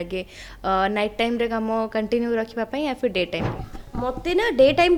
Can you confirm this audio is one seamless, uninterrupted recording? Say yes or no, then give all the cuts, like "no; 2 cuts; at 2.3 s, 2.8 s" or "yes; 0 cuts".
yes; 0 cuts